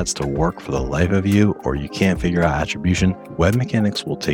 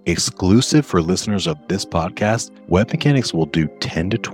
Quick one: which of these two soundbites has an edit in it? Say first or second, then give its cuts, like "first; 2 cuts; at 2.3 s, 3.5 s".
second; 1 cut; at 2.5 s